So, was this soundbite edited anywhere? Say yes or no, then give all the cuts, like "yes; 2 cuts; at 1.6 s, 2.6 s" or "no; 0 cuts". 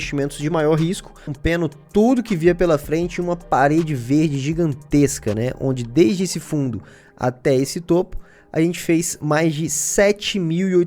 yes; 1 cut; at 1.3 s